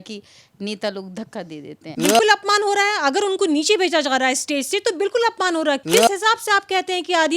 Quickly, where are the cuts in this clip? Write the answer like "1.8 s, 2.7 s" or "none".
1.9 s, 5.8 s